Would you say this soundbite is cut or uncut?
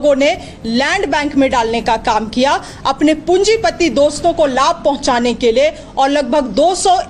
uncut